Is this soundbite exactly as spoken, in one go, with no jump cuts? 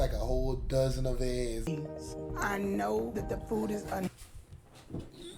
no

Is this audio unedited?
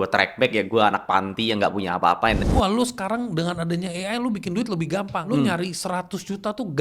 no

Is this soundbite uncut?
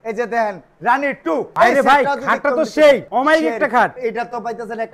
no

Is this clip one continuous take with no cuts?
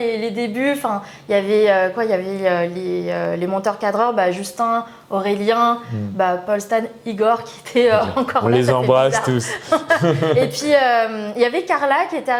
yes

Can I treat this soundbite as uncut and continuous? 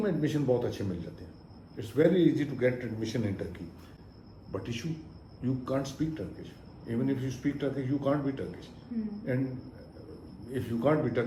yes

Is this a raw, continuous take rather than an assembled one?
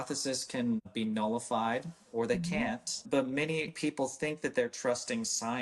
no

